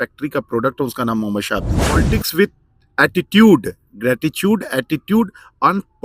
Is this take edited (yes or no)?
yes